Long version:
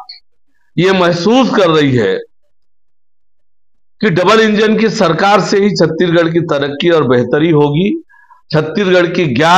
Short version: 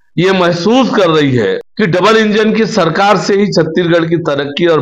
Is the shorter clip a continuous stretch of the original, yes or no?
no